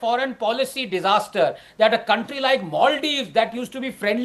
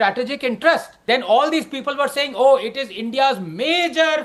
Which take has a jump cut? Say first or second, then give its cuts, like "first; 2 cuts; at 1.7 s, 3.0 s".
second; 1 cut; at 0.9 s